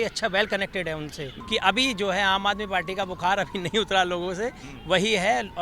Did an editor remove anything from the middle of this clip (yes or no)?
yes